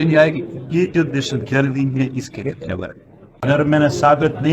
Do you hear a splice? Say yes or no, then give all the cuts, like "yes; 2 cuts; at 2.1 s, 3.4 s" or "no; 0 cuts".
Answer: yes; 1 cut; at 3.5 s